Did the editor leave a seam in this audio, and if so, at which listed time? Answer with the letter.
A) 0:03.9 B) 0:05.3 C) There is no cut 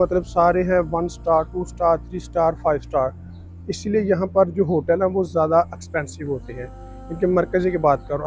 C